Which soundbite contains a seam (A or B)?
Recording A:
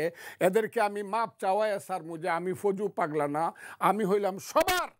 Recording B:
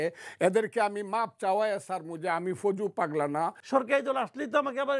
B